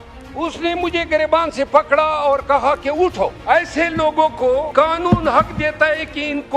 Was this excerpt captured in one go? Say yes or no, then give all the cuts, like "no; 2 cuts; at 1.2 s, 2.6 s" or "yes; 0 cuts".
no; 2 cuts; at 3.4 s, 4.7 s